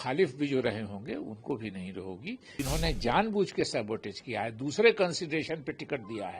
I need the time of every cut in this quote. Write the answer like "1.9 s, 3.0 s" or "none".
2.6 s